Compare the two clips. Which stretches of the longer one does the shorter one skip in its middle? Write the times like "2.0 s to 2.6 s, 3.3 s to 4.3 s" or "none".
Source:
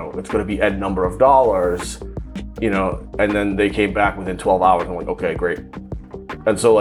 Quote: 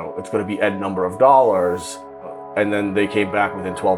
2.4 s to 3.0 s